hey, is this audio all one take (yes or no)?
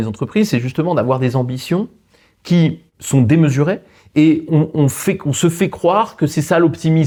yes